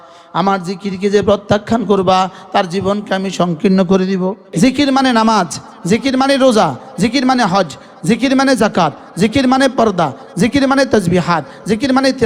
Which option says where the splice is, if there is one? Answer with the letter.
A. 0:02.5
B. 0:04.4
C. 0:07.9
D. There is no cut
B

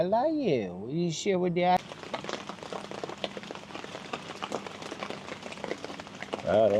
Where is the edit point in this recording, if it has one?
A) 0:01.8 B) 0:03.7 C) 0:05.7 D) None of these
A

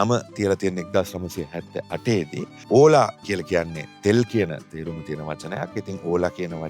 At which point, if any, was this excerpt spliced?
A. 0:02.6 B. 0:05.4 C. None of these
A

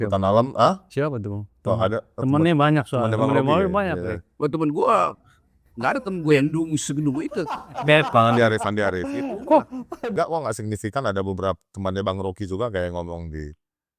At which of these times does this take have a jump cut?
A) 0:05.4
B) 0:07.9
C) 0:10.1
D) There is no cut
C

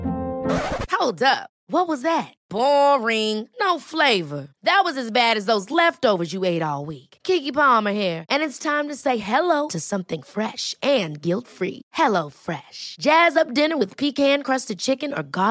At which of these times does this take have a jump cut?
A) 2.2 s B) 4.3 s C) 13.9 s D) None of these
D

